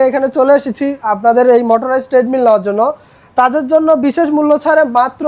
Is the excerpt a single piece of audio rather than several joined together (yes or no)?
yes